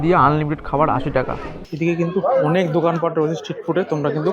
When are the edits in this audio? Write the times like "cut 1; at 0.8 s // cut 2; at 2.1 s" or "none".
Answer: cut 1; at 1.6 s